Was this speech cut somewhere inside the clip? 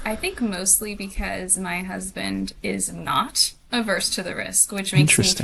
no; 0 cuts

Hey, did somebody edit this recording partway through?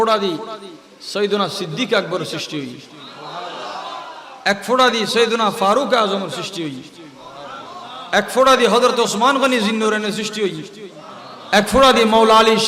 yes; 1 cut; at 3.0 s

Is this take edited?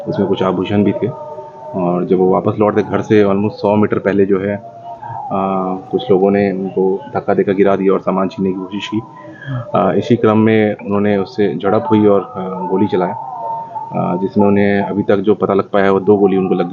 no; 0 cuts

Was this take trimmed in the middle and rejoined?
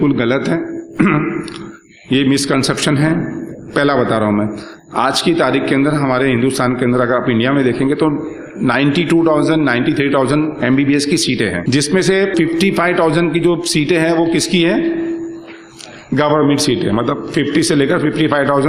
yes; 2 cuts; at 11.6 s, 12.3 s

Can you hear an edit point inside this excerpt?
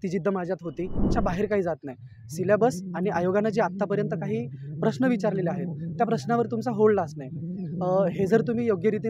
yes; 1 cut; at 1.1 s

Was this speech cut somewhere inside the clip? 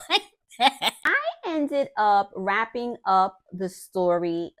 yes; 1 cut; at 1.1 s

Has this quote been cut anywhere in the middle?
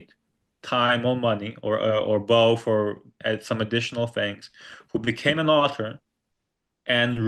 no; 0 cuts

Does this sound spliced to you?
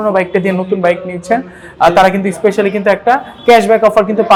no; 0 cuts

